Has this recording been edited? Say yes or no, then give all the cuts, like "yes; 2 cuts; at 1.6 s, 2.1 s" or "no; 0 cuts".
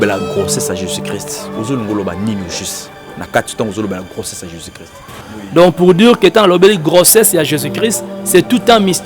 yes; 1 cut; at 5.2 s